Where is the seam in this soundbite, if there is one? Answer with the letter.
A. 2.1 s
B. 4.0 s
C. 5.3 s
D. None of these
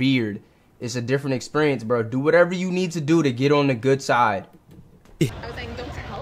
C